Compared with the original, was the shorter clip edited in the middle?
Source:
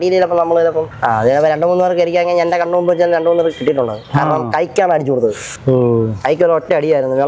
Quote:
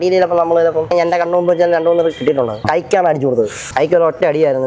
yes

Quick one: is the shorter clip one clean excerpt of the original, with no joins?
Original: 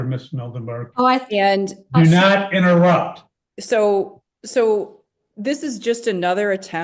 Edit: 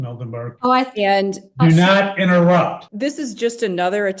no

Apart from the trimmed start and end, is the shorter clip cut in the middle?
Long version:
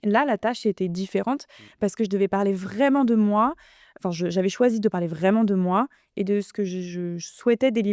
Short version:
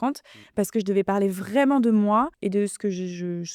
yes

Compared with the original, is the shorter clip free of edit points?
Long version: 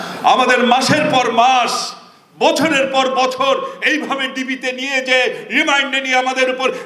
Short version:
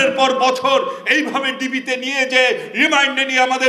yes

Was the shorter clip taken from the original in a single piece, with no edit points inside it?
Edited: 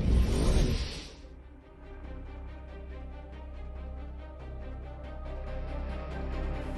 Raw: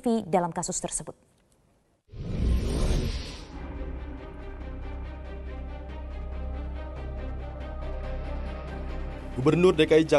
no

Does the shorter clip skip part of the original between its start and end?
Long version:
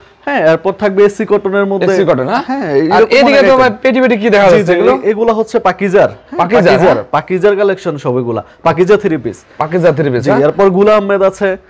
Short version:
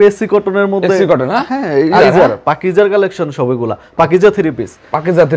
yes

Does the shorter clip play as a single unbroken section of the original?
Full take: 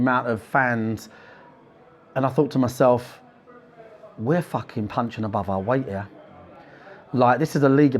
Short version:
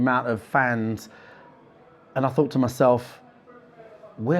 yes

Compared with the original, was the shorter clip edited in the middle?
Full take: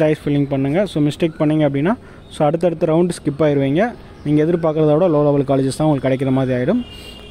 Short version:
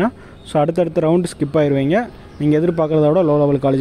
no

